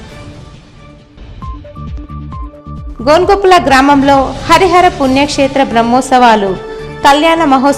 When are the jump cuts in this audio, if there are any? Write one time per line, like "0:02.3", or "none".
0:02.8